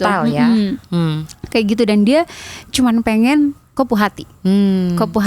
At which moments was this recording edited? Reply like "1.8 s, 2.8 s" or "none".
3.6 s